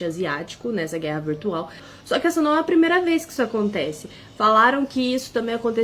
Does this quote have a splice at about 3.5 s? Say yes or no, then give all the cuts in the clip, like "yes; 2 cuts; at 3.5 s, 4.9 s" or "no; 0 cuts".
no; 1 cut; at 1.9 s